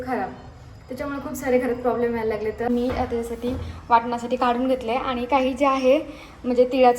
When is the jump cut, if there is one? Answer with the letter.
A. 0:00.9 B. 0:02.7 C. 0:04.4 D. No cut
B